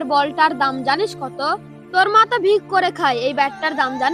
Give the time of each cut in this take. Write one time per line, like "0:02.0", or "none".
none